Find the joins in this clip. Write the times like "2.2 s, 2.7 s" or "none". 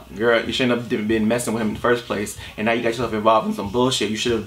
none